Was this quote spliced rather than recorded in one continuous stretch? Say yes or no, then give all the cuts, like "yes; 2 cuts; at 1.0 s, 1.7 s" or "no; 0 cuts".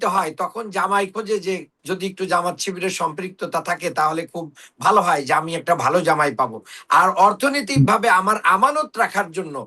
yes; 1 cut; at 1.7 s